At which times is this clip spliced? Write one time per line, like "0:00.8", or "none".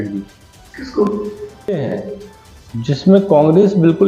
0:01.8